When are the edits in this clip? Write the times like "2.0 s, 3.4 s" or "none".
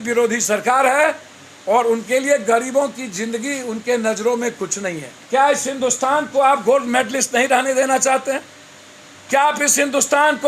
5.1 s